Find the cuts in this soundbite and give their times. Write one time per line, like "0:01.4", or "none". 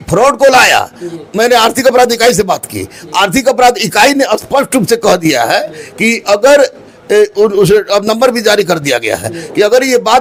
none